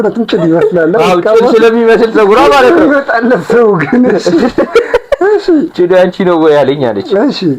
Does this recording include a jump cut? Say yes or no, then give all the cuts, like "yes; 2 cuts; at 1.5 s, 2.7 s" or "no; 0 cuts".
no; 0 cuts